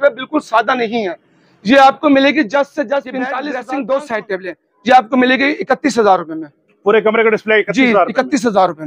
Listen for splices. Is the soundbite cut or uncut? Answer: cut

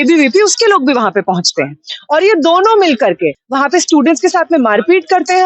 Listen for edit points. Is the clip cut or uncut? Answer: cut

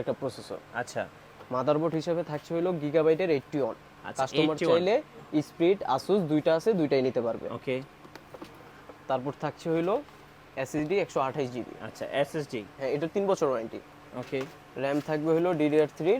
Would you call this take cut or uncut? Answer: uncut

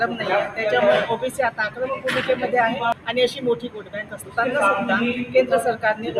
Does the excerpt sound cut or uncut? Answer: cut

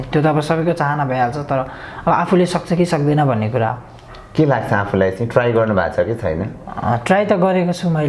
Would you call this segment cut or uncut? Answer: uncut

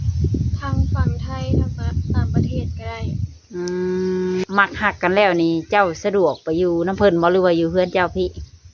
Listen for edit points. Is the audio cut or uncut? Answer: cut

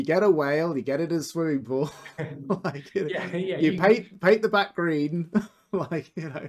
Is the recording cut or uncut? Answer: uncut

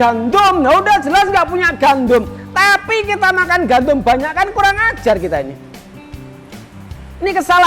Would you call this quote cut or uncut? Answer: uncut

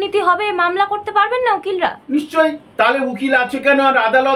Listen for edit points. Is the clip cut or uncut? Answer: uncut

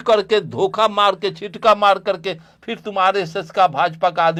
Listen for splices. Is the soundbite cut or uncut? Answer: uncut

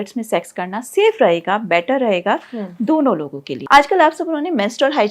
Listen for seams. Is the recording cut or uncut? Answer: cut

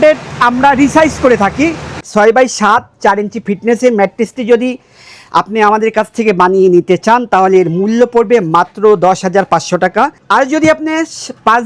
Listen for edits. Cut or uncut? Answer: cut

